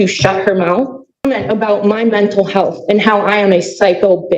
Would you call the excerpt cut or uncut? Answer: cut